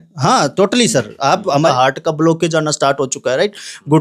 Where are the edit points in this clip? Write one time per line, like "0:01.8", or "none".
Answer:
0:01.6